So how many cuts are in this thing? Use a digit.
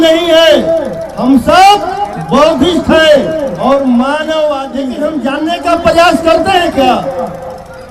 1